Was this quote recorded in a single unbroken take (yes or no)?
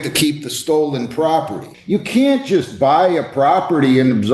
no